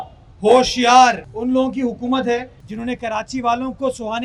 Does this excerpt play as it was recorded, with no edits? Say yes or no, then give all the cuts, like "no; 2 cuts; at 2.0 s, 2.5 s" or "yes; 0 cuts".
no; 2 cuts; at 1.3 s, 2.6 s